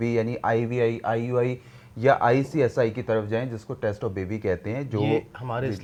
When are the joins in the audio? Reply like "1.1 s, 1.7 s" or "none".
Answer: none